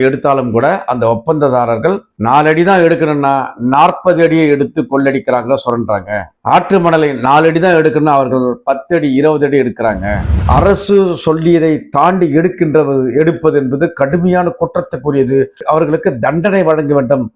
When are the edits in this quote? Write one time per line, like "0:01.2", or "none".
0:10.4